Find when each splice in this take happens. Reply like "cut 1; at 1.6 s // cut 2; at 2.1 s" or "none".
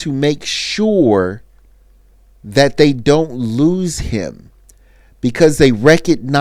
none